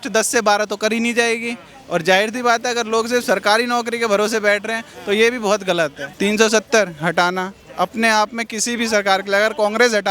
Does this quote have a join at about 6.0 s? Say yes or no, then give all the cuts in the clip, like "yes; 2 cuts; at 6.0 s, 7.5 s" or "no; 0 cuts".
yes; 1 cut; at 6.0 s